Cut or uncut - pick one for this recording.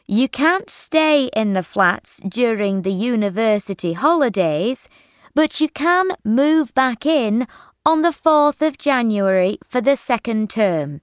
uncut